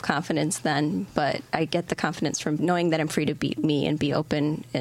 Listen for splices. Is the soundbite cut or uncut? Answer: cut